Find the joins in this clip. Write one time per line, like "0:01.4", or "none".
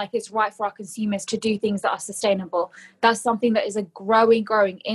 none